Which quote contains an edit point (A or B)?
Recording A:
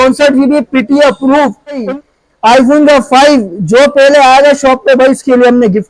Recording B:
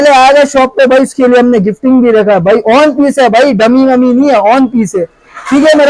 A